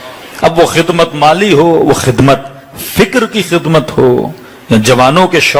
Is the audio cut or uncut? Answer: uncut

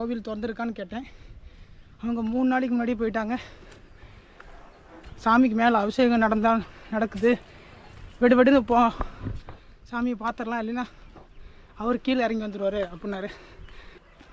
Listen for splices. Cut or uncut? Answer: uncut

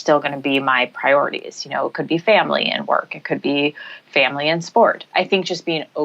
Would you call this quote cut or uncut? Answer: cut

